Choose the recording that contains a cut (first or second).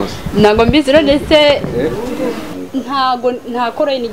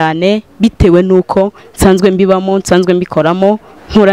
first